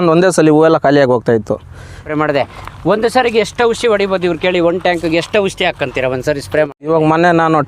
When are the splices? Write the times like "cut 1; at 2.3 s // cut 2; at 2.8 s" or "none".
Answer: cut 1; at 2.0 s // cut 2; at 6.9 s